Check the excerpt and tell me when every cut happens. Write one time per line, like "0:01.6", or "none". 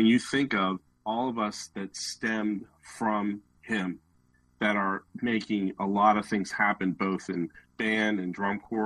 0:00.9